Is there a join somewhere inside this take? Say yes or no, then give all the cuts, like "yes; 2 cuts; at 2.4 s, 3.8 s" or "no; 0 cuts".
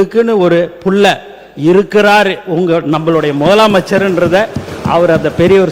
no; 0 cuts